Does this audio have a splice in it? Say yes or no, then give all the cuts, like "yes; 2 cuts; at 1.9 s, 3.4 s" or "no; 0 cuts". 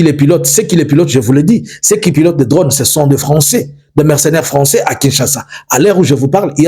no; 0 cuts